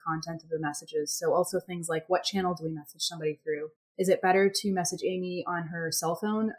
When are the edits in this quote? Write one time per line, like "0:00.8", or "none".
0:03.8